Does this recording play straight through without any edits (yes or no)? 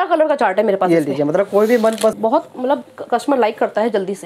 no